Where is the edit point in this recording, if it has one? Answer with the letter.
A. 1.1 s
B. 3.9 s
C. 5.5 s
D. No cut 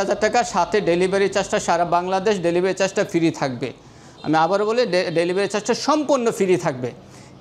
D